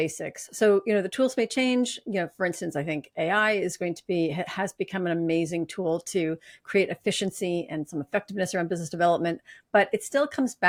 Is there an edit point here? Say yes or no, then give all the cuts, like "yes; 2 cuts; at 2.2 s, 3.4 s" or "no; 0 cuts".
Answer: no; 0 cuts